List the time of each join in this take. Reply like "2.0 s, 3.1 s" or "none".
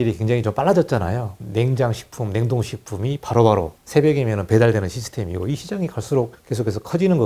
1.3 s, 3.8 s, 6.4 s